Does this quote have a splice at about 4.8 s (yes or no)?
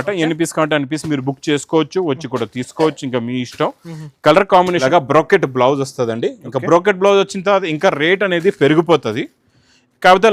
yes